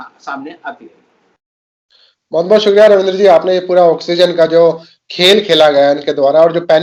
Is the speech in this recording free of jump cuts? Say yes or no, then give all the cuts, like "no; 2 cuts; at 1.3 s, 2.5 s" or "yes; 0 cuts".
yes; 0 cuts